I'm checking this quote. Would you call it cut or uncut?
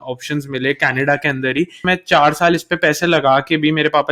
cut